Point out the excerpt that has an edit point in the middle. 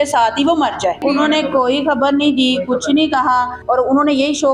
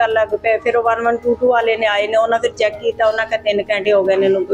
first; 2 cuts; at 1.0 s, 3.6 s

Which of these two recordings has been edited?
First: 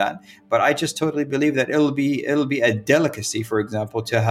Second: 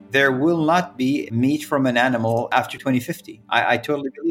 second; 2 cuts; at 1.3 s, 2.6 s

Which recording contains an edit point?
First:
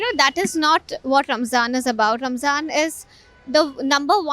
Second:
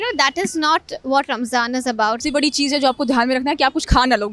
second; 1 cut; at 2.2 s

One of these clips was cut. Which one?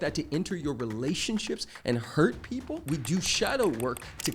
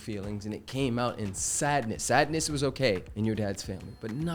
first; 1 cut; at 2.8 s

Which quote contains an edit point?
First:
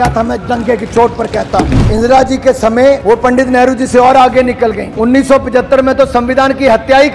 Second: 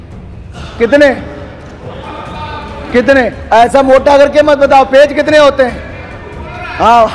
first; 3 cuts; at 1.8 s, 3.0 s, 4.9 s

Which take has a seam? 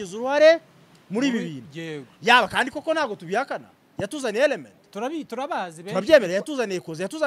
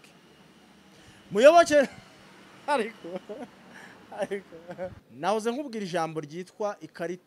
second; 1 cut; at 5.0 s

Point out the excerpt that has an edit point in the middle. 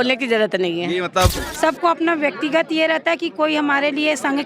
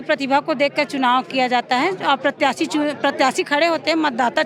first; 1 cut; at 1.3 s

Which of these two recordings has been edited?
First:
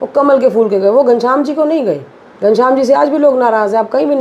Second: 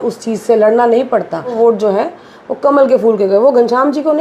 second; 1 cut; at 1.5 s

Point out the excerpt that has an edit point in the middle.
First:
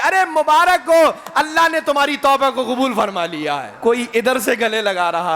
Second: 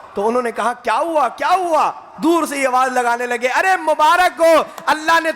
first; 1 cut; at 3.7 s

